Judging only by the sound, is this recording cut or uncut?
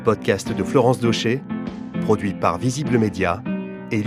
uncut